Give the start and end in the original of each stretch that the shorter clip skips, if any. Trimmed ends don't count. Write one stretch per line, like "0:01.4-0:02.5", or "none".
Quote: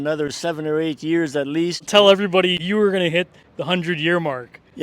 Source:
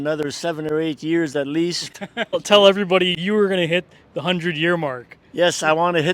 0:01.9-0:02.4

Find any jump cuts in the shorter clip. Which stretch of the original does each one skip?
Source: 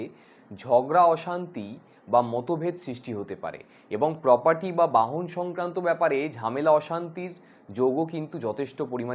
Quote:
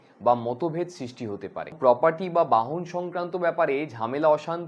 0:03.6-0:04.2

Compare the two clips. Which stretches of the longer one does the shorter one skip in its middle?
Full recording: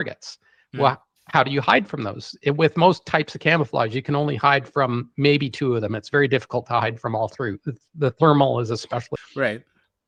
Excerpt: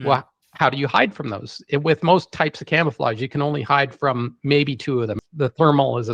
0:06.0-0:07.9

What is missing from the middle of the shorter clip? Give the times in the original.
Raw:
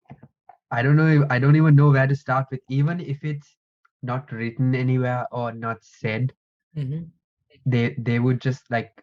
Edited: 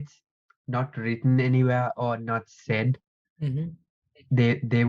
none

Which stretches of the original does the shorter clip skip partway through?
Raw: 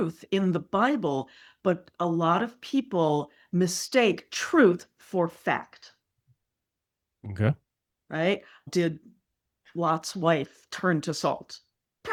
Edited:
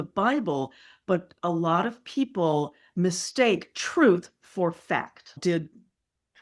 0:05.8-0:08.6

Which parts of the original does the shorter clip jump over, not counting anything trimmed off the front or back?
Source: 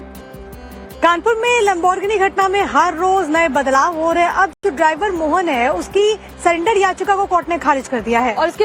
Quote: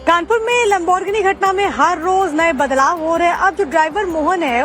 0:04.5-0:04.6

